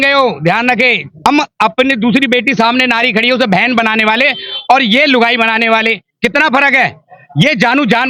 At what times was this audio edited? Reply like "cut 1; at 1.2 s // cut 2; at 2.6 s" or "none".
cut 1; at 1.2 s